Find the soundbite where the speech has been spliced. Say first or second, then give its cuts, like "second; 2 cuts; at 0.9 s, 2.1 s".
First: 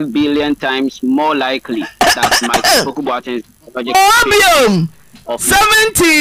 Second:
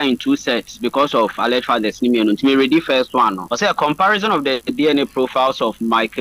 second; 2 cuts; at 3.4 s, 4.6 s